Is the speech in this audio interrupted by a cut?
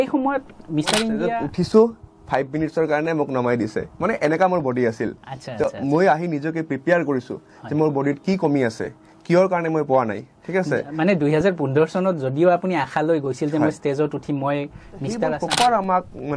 yes; 2 cuts; at 1.2 s, 15.3 s

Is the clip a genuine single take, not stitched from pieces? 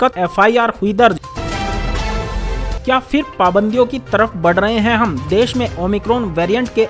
no; 2 cuts; at 1.2 s, 2.8 s

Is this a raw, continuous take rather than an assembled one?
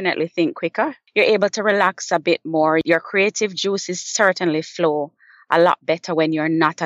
no; 2 cuts; at 1.0 s, 2.8 s

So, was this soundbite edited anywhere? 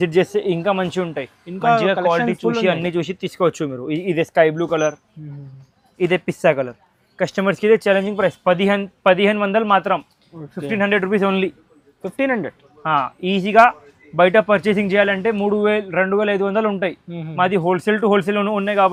no; 0 cuts

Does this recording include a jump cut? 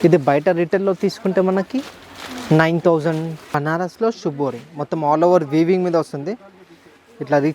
yes; 1 cut; at 3.5 s

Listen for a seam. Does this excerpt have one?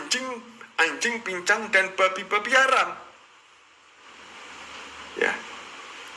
no; 0 cuts

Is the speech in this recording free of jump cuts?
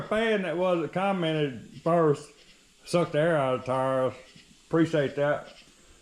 yes; 0 cuts

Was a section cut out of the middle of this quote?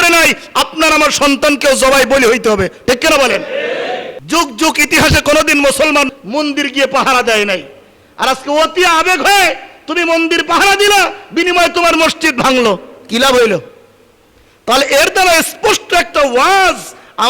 yes; 1 cut; at 4.1 s

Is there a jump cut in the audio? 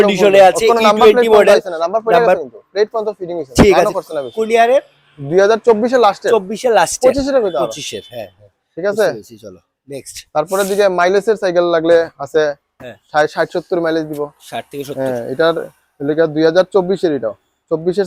no; 0 cuts

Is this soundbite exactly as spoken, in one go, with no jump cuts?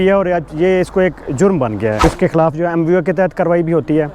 no; 1 cut; at 2.0 s

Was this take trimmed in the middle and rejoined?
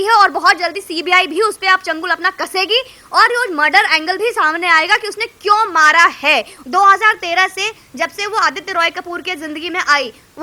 yes; 1 cut; at 6.5 s

